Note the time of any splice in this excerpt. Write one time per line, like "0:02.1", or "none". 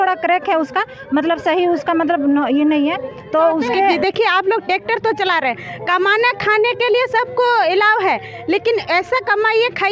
0:04.0